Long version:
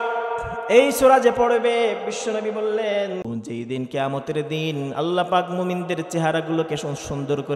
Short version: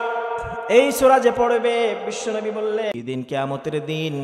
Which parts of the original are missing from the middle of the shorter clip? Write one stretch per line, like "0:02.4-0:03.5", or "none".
0:02.9-0:03.6